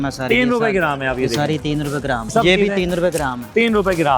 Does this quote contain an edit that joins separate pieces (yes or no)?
yes